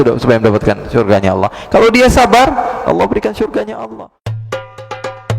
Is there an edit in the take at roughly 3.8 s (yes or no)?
yes